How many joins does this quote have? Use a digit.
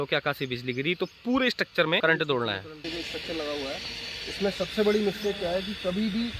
2